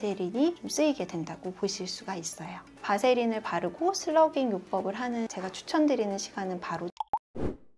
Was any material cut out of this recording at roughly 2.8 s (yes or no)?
yes